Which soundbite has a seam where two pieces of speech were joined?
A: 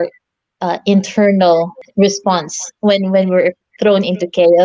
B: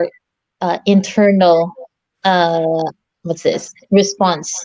A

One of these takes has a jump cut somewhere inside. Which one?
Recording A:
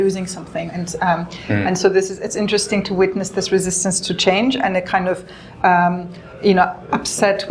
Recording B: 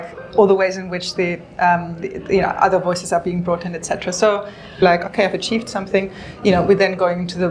B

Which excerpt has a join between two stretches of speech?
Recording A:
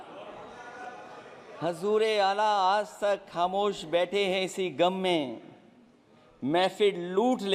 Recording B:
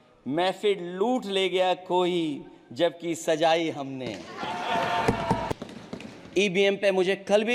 B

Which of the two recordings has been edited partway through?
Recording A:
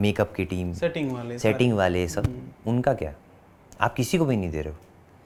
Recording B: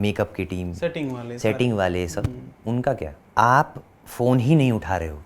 B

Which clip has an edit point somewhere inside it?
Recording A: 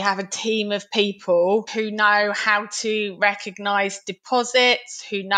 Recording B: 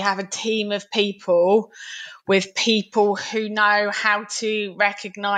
A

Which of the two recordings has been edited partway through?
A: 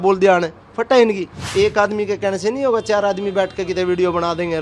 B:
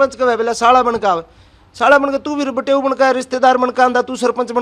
A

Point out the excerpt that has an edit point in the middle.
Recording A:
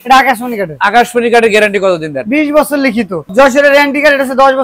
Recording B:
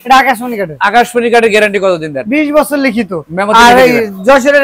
A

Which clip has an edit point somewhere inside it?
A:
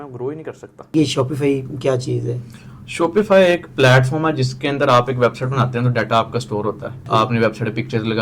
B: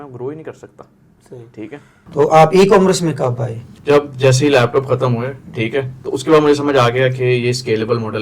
A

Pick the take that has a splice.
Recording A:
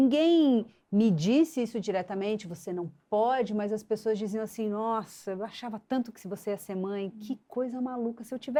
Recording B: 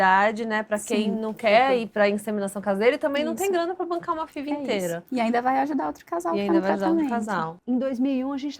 B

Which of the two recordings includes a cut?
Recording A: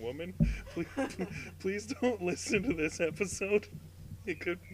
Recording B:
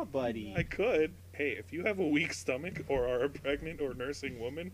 B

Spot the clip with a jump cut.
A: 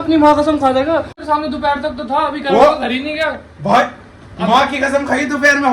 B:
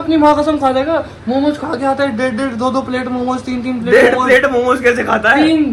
A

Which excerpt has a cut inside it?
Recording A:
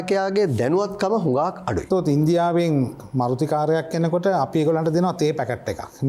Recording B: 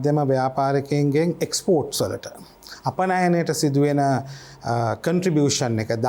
A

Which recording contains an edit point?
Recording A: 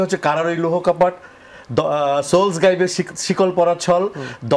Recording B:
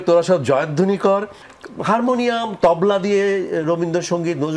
B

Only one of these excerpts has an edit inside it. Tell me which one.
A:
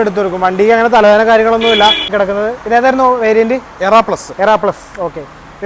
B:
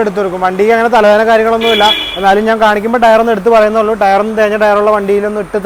A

